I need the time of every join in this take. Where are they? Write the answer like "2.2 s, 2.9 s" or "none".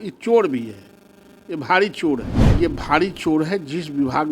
2.4 s